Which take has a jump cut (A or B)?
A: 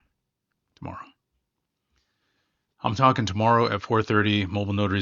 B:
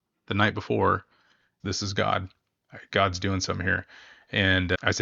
B